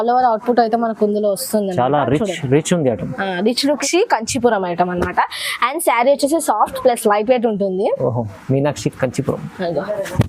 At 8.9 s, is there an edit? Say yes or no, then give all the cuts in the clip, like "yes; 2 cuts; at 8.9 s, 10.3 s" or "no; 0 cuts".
no; 1 cut; at 3.8 s